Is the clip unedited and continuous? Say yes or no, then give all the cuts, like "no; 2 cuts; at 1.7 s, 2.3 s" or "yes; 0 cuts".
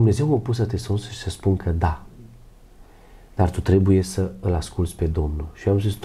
yes; 0 cuts